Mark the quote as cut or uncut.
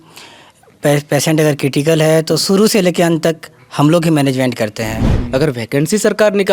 cut